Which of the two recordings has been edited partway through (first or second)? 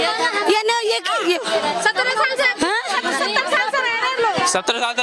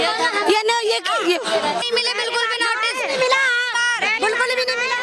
second